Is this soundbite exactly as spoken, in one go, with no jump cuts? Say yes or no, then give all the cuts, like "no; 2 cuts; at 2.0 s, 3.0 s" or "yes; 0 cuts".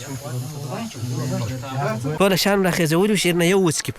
no; 1 cut; at 2.1 s